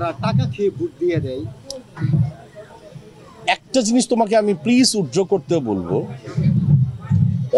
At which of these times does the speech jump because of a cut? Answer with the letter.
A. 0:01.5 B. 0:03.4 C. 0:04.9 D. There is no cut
D